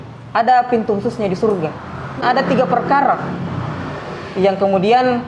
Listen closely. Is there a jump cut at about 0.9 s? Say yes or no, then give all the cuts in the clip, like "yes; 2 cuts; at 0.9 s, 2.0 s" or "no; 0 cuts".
no; 1 cut; at 2.2 s